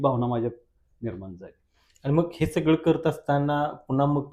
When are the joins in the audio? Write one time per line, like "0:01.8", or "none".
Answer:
none